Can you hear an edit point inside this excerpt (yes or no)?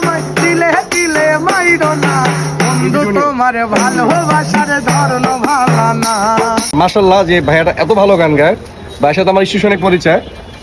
yes